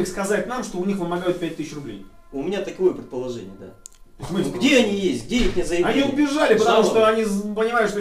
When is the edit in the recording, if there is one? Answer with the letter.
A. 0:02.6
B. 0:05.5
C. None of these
C